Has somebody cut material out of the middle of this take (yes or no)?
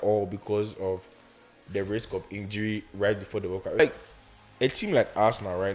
yes